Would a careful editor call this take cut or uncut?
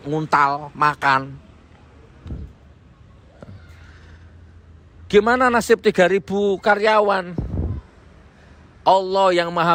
uncut